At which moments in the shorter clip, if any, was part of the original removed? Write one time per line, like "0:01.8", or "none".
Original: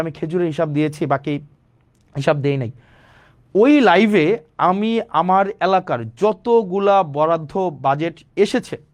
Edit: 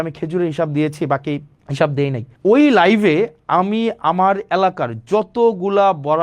0:01.6
0:02.3